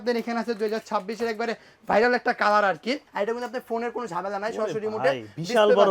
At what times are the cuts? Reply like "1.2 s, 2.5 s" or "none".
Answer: 3.1 s